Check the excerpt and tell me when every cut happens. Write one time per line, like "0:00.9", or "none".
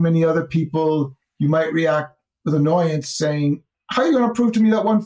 0:01.2
0:03.8